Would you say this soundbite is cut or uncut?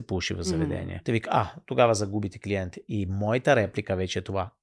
cut